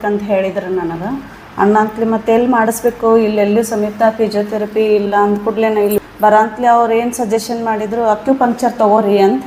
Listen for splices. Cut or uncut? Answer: uncut